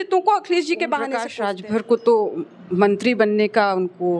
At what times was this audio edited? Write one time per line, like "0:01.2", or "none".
0:01.2